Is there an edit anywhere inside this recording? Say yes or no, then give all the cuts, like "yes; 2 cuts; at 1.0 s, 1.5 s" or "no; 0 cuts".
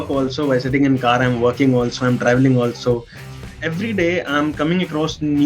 yes; 1 cut; at 3.2 s